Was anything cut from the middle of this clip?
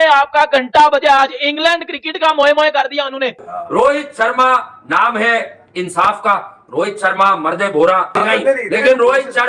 yes; 2 cuts; at 3.5 s, 8.1 s

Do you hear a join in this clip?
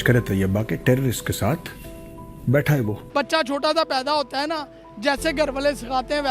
yes; 1 cut; at 3.0 s

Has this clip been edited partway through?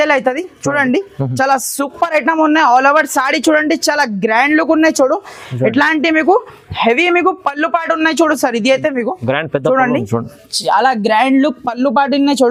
no; 0 cuts

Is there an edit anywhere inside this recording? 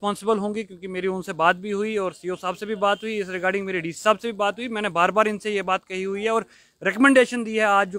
no; 0 cuts

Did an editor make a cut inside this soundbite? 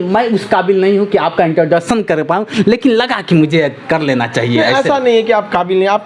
no; 0 cuts

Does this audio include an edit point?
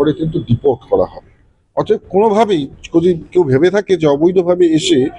no; 0 cuts

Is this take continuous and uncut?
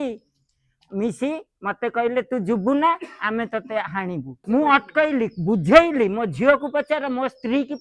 no; 1 cut; at 4.3 s

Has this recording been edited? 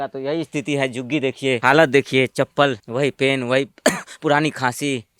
yes; 2 cuts; at 1.6 s, 2.8 s

